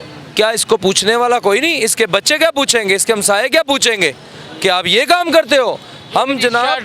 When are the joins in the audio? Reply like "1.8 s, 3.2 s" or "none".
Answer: none